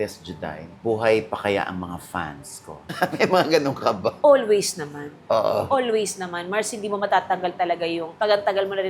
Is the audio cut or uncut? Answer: uncut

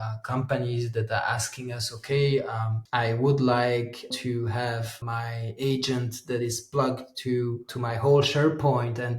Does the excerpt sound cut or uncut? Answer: cut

